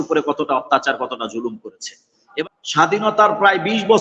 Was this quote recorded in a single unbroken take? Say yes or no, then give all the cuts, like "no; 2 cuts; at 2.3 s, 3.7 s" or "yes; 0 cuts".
no; 1 cut; at 2.3 s